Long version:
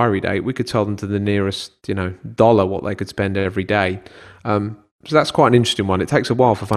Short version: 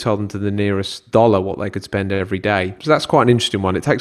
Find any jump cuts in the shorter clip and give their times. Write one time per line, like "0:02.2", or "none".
0:01.0
0:02.8